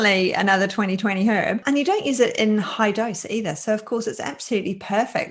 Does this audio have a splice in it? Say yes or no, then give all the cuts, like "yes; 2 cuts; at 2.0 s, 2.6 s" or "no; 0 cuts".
no; 0 cuts